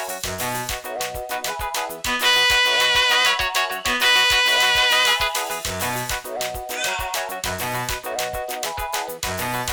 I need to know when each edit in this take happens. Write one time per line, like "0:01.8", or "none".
none